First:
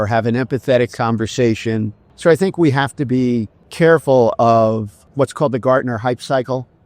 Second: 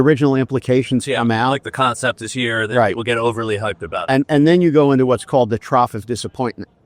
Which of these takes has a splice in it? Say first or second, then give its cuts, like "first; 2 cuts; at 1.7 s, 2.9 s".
first; 3 cuts; at 2.0 s, 3.6 s, 5.0 s